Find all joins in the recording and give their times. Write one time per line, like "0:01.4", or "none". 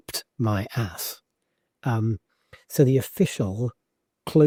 none